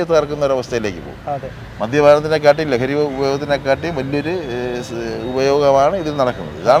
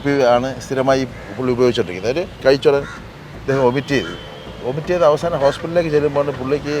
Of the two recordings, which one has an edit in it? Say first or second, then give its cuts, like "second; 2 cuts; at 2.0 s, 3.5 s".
second; 1 cut; at 2.3 s